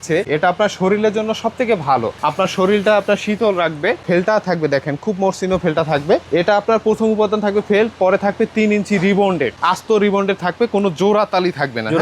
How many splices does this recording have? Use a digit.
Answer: 0